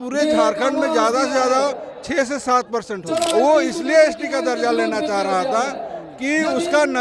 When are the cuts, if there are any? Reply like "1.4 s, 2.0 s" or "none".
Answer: 3.3 s

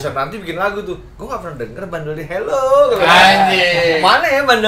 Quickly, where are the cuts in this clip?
none

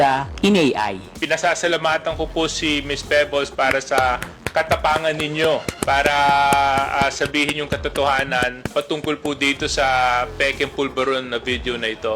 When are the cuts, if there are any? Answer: 1.1 s, 5.7 s, 8.7 s

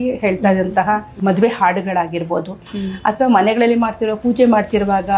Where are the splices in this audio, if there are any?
1.1 s

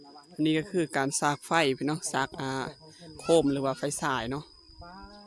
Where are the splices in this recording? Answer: none

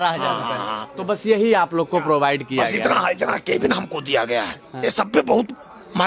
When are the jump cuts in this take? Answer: 4.6 s

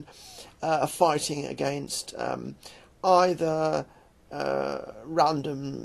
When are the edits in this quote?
3.5 s

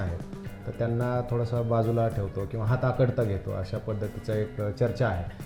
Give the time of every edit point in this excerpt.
none

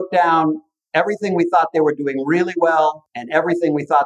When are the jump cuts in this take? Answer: 3.1 s

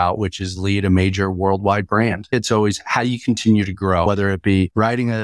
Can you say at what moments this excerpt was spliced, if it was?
2.3 s, 4.0 s

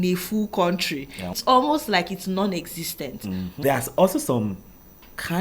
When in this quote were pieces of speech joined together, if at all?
1.4 s, 3.5 s

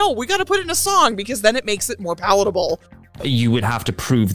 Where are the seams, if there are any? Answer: 3.1 s

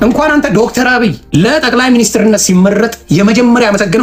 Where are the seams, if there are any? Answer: 1.2 s

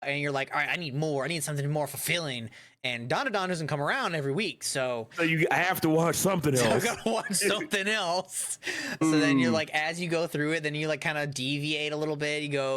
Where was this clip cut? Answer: 5.1 s, 9.0 s

